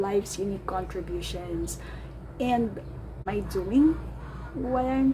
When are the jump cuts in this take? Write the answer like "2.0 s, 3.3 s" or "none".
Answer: 3.3 s